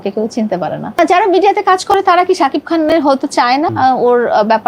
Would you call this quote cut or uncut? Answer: cut